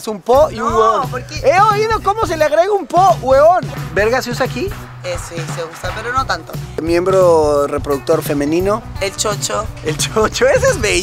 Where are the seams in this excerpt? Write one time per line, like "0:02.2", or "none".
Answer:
0:03.8
0:08.9